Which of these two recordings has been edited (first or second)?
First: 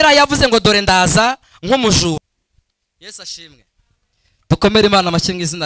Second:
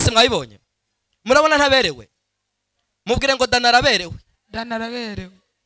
first